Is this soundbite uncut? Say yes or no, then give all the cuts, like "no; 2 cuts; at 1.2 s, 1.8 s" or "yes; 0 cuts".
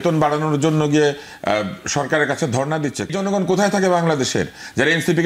no; 1 cut; at 3.1 s